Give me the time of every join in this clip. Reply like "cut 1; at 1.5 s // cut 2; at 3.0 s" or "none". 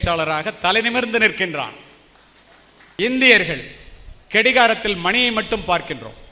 cut 1; at 3.0 s